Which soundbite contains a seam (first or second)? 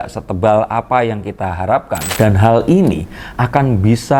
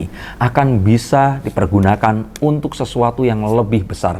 first